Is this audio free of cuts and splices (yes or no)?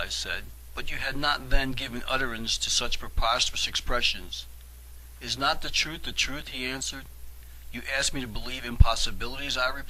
yes